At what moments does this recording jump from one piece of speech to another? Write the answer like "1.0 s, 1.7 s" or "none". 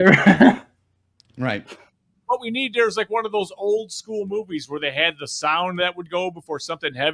2.1 s